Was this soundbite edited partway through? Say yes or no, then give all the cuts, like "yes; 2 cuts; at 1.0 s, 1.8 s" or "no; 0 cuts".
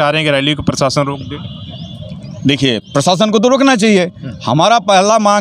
no; 0 cuts